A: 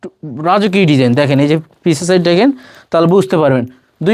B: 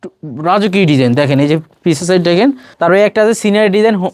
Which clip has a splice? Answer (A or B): B